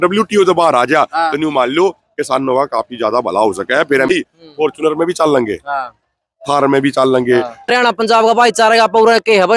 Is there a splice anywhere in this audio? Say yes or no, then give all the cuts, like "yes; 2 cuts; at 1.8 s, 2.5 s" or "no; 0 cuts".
yes; 2 cuts; at 4.1 s, 7.7 s